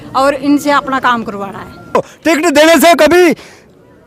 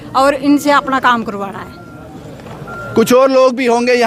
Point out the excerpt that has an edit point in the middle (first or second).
first